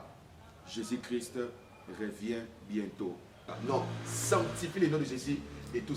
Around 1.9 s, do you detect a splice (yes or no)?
no